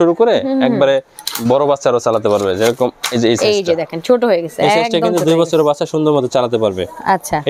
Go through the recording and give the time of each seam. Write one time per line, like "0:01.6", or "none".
none